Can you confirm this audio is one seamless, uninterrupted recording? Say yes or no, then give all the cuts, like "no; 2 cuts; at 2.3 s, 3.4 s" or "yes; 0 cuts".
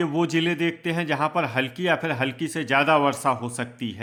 yes; 0 cuts